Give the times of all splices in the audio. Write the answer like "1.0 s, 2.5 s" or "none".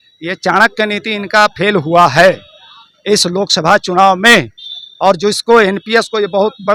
none